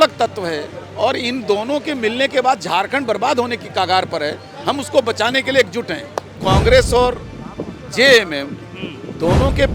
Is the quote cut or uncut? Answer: cut